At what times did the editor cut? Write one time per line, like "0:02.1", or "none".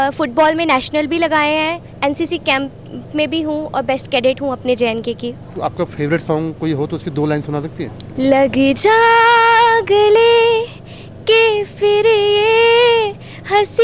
0:05.5
0:08.0